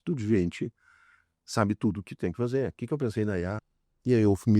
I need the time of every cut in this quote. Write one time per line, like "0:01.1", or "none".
0:03.7